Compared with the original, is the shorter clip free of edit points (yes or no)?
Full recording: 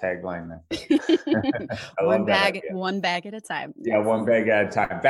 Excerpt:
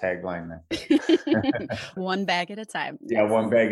no